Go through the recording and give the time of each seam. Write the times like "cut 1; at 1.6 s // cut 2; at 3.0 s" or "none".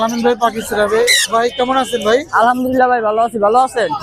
none